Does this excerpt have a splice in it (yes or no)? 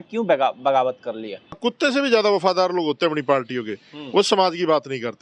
yes